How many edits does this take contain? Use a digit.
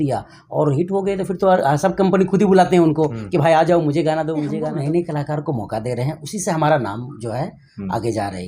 1